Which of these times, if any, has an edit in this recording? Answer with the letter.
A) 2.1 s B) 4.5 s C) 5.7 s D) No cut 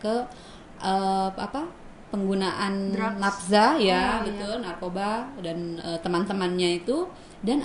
D